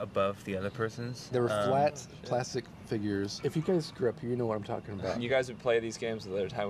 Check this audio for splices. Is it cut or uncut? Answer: uncut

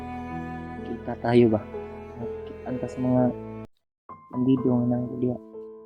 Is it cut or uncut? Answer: cut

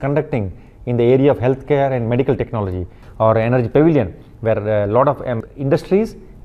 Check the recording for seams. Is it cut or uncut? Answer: cut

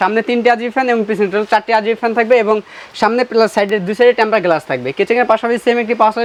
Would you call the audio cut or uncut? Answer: uncut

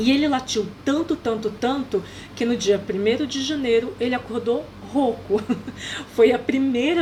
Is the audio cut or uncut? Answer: uncut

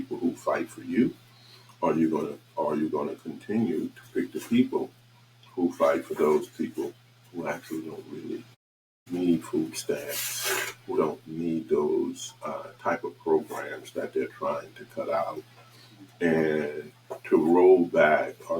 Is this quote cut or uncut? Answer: uncut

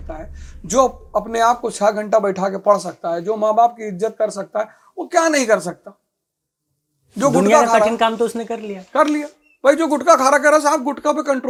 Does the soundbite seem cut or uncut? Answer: uncut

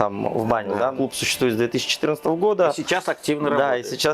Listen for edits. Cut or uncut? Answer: cut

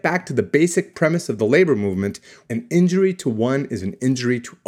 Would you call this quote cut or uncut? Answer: cut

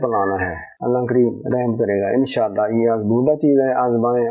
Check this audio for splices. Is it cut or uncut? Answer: uncut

